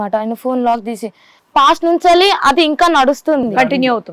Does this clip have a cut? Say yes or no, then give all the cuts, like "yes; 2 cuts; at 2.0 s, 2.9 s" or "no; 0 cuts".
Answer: yes; 1 cut; at 1.4 s